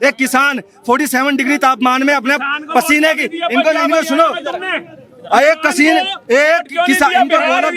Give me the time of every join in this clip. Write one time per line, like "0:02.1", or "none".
none